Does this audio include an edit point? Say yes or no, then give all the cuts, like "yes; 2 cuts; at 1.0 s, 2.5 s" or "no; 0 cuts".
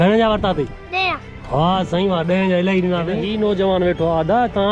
yes; 1 cut; at 3.2 s